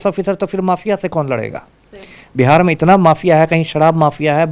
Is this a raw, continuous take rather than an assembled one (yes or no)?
yes